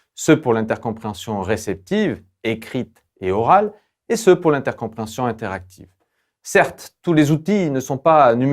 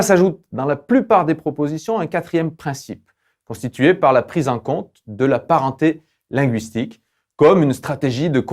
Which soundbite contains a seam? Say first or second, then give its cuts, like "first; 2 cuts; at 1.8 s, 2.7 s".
first; 1 cut; at 7.6 s